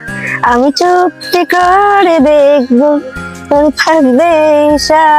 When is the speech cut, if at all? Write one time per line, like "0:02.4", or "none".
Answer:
none